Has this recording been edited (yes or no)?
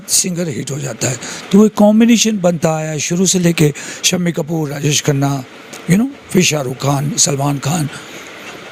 no